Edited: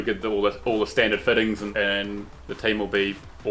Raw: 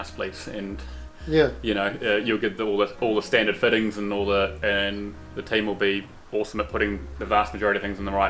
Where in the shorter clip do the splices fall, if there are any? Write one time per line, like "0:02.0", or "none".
0:01.7